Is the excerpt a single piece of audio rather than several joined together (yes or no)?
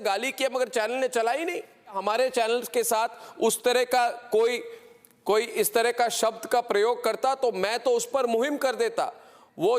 no